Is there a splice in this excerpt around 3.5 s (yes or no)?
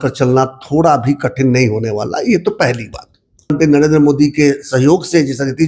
yes